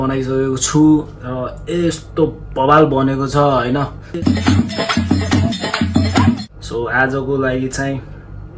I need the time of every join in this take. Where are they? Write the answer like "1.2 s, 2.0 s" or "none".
4.1 s, 6.5 s